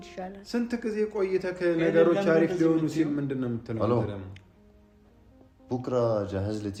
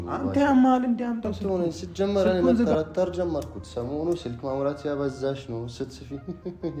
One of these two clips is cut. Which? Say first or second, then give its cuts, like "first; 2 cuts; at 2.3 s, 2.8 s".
second; 1 cut; at 1.3 s